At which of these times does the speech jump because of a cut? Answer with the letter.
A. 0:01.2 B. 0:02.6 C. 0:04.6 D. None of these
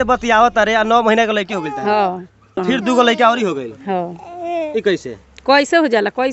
B